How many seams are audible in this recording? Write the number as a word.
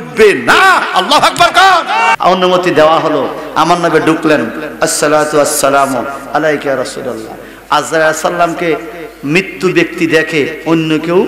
one